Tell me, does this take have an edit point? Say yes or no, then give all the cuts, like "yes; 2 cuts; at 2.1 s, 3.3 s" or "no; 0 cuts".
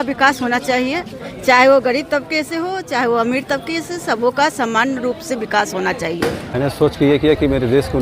yes; 1 cut; at 6.5 s